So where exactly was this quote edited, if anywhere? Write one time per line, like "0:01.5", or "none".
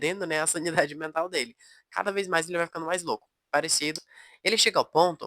0:04.0